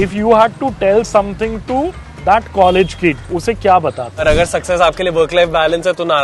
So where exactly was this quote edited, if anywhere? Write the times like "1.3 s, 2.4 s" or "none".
3.2 s, 4.2 s